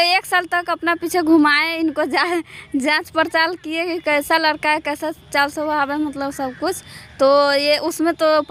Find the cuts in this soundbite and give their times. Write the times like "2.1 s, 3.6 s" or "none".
none